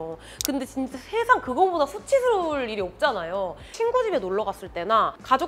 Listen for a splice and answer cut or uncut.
cut